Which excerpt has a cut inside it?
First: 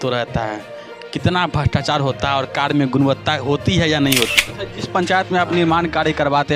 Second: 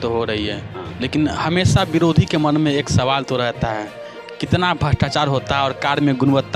first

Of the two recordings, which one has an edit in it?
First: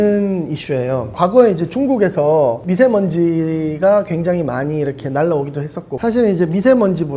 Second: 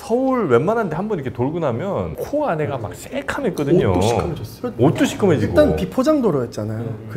first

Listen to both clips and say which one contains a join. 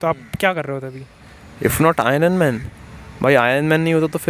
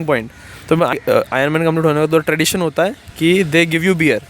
second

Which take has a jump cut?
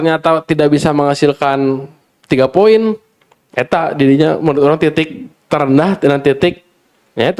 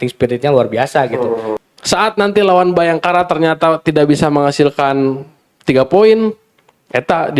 second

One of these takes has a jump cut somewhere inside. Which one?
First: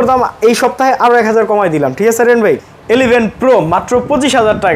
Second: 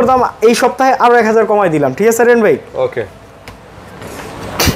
first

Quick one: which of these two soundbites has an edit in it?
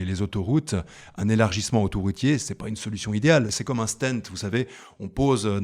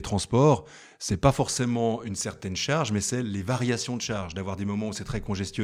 first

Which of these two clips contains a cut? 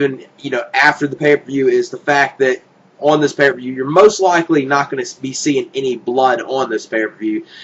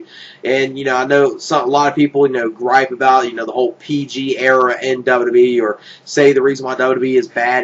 second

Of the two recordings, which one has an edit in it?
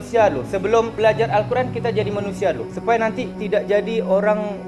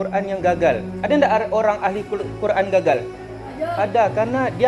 first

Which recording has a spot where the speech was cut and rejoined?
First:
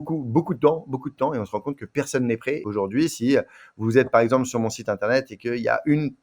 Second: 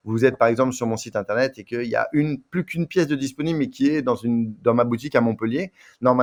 first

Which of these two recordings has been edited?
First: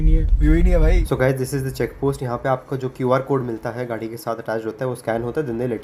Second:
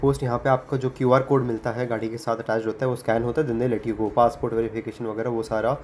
first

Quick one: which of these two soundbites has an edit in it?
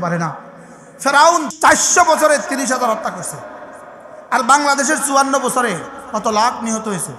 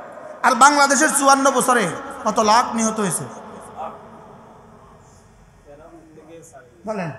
first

